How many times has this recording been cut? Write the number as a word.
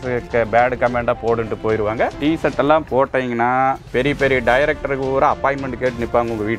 two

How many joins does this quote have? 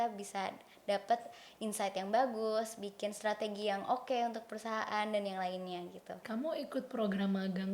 one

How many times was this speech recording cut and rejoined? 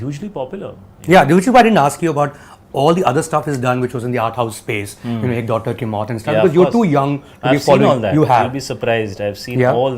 zero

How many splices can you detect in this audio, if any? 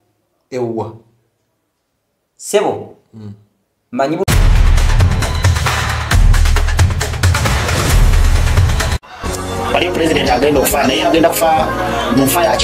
one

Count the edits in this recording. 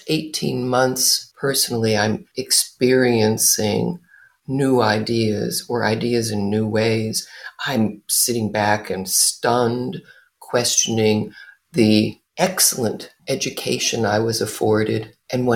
one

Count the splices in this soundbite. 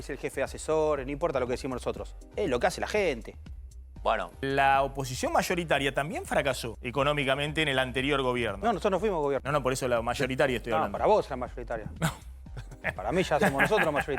three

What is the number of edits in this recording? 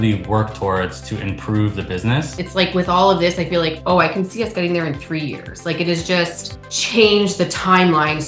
one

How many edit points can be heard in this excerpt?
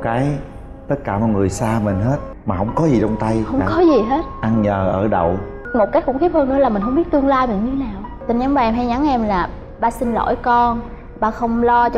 three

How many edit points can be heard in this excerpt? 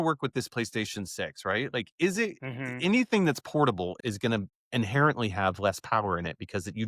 one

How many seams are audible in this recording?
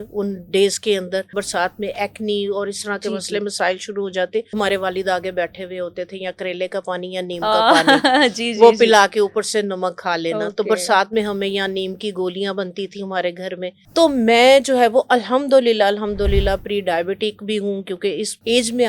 three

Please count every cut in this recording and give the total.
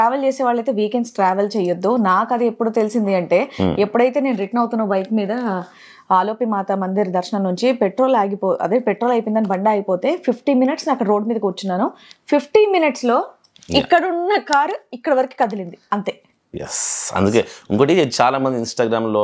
zero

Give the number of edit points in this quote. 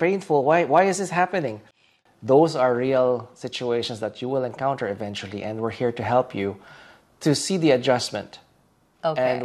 zero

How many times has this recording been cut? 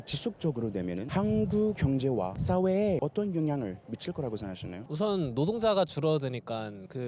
four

